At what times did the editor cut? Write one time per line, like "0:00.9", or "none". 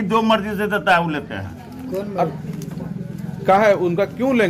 none